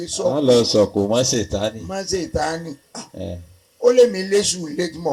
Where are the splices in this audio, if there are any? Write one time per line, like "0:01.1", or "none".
none